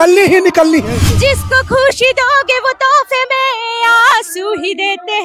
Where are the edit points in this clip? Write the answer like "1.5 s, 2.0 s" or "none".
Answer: 1.0 s